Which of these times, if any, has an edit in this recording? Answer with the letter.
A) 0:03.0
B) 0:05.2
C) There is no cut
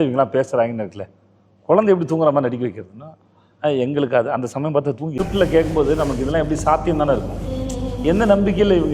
B